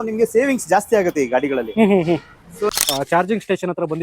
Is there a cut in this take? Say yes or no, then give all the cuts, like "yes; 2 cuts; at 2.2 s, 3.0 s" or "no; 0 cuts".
yes; 1 cut; at 2.8 s